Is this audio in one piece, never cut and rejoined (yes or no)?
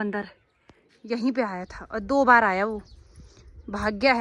no